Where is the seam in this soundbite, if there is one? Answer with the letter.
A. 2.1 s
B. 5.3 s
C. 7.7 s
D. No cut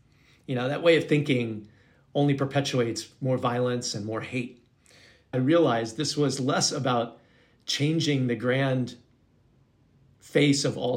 B